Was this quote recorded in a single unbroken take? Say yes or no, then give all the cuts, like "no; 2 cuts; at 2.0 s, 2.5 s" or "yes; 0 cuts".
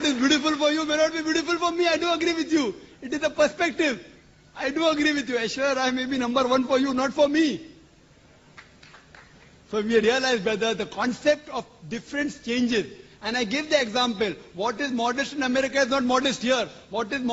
no; 1 cut; at 14.7 s